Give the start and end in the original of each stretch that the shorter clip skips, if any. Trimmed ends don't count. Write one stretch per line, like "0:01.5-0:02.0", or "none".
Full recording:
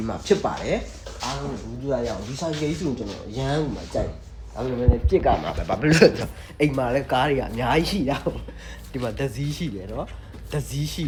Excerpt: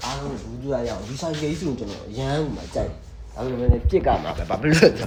none